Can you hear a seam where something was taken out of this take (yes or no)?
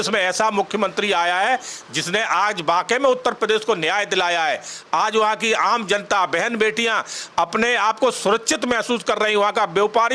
no